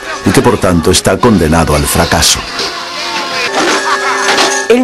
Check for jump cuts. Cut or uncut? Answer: uncut